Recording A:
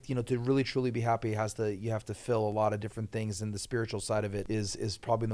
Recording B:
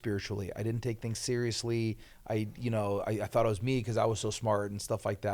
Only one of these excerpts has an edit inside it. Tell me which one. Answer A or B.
A